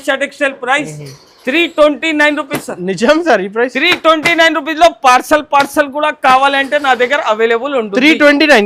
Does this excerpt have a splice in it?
no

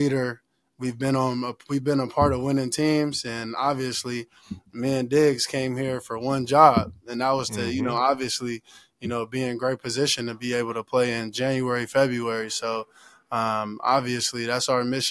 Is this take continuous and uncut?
yes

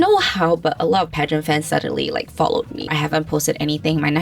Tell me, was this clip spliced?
yes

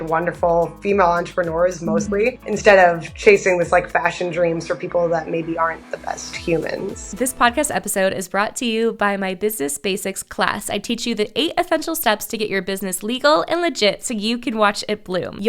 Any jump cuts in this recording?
yes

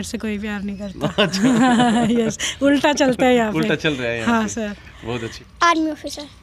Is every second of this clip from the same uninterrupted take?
no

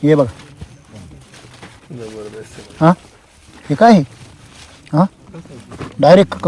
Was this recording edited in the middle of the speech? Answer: no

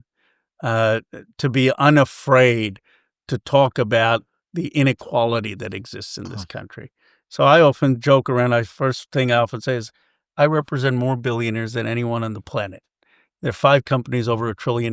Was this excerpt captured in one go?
yes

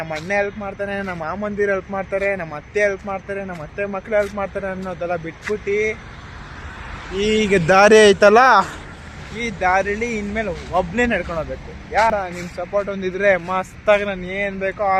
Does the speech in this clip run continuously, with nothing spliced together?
no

